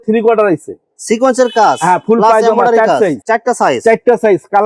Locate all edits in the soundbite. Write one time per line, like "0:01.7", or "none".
none

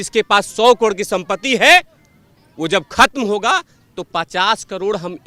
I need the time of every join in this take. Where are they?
none

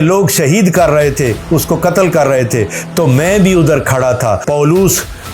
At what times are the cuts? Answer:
0:04.4

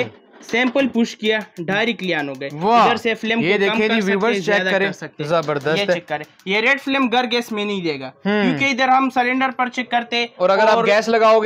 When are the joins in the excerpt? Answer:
none

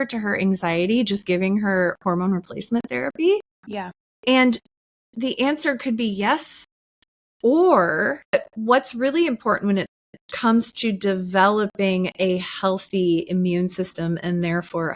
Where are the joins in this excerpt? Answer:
0:08.3

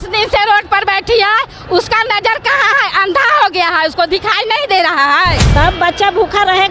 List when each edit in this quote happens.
0:05.4

